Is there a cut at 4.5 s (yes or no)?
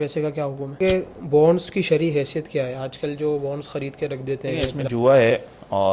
yes